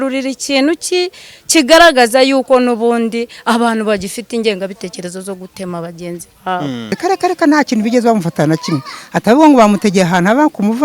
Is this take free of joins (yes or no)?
no